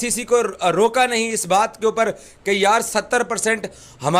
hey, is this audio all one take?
yes; 0 cuts

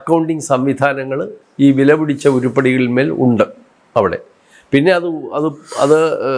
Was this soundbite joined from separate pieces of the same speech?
no; 0 cuts

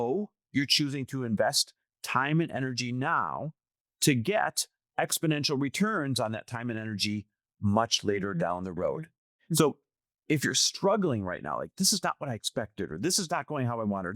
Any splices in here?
yes; 1 cut; at 9.2 s

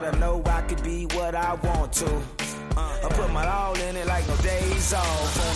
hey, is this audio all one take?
yes; 0 cuts

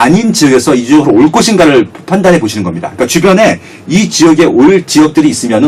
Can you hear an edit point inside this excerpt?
no; 0 cuts

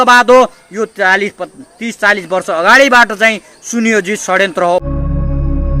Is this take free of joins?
no; 1 cut; at 4.8 s

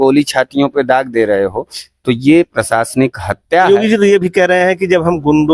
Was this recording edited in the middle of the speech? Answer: yes; 1 cut; at 3.7 s

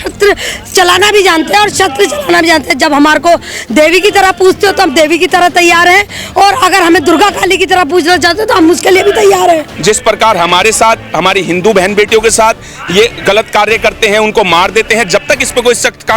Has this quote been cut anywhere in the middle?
yes; 2 cuts; at 9.7 s, 13.2 s

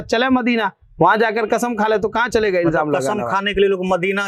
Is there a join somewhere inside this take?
no; 0 cuts

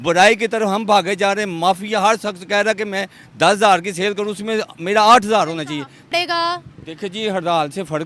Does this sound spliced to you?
yes; 1 cut; at 6.1 s

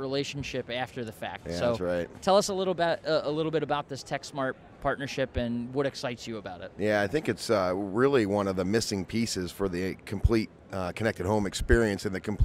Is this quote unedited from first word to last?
yes; 0 cuts

